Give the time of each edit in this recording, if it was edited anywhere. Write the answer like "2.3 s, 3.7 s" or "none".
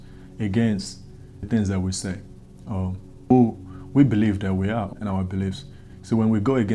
1.4 s, 3.3 s, 4.9 s